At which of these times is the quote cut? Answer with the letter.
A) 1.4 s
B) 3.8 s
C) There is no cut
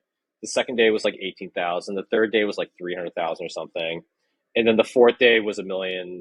C